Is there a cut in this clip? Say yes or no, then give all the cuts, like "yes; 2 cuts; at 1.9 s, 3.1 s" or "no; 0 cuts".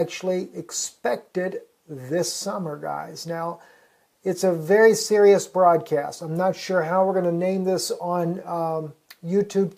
no; 0 cuts